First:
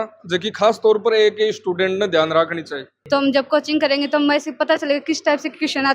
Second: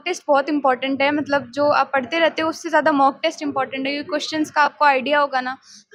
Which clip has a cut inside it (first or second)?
first